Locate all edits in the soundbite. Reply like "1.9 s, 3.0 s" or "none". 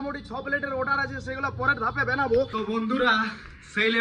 2.6 s

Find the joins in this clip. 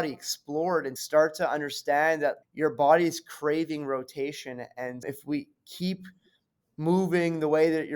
1.0 s, 2.4 s

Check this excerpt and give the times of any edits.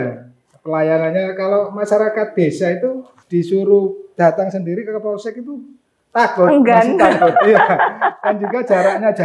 3.1 s, 4.0 s

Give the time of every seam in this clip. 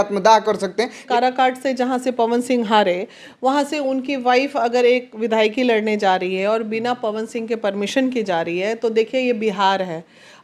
1.0 s

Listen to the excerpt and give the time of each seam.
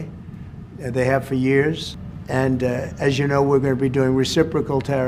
none

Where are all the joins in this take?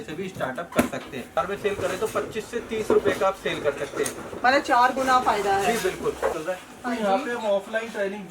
1.4 s, 6.3 s

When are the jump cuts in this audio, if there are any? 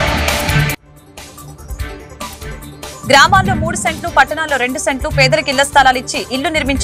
none

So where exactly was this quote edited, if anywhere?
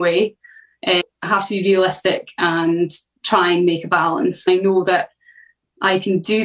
1.0 s, 3.1 s, 4.5 s

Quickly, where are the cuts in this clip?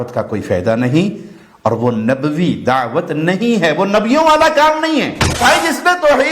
5.4 s

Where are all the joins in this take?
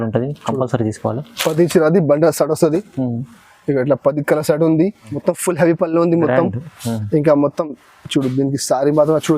5.1 s

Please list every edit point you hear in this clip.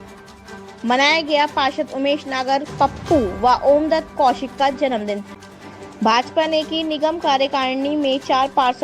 5.4 s

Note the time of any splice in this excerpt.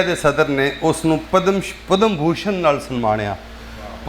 none

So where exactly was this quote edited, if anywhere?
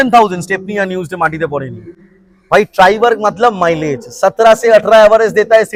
none

